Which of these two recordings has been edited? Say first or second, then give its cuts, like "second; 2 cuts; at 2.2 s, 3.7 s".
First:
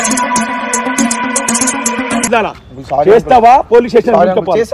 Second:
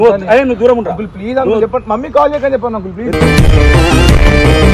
first; 1 cut; at 2.3 s